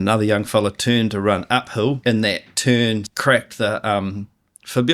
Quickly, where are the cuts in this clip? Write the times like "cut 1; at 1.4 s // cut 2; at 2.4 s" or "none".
cut 1; at 2.0 s // cut 2; at 3.1 s